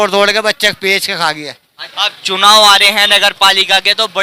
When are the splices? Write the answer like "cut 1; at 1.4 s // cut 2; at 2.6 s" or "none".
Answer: cut 1; at 1.9 s